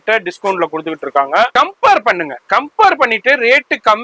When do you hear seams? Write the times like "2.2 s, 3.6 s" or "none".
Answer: 1.5 s